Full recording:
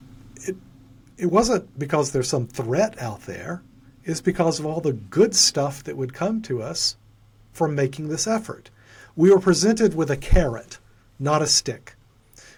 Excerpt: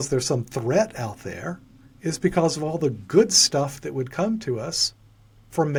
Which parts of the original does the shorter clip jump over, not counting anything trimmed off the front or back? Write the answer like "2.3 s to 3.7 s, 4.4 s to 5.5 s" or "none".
none